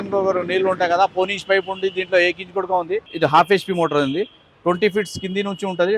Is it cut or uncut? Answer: cut